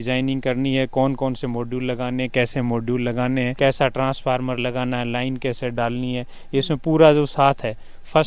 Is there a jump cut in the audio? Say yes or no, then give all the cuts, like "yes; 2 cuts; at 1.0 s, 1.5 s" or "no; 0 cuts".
no; 0 cuts